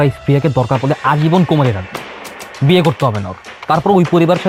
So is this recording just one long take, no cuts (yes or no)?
yes